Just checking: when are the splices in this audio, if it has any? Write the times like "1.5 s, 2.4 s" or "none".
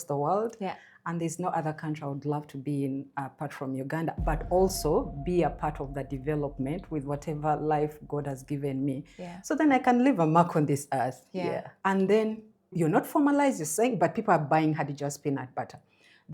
11.7 s